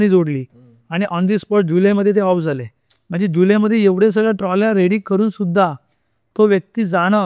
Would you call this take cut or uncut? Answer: uncut